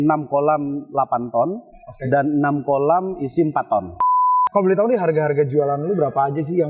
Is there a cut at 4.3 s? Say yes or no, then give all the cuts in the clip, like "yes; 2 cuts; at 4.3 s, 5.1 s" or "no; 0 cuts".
yes; 1 cut; at 4.3 s